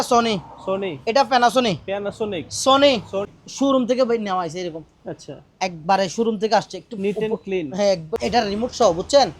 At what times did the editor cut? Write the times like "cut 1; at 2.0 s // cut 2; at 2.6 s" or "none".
cut 1; at 3.4 s // cut 2; at 8.1 s